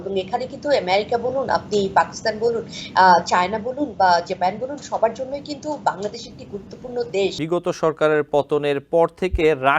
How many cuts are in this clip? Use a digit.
1